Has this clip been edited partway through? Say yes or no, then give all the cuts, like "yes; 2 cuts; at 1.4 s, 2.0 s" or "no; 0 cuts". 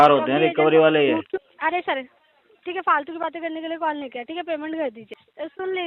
yes; 2 cuts; at 1.5 s, 5.0 s